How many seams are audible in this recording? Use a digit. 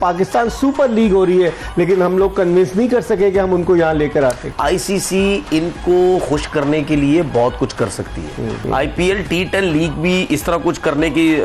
2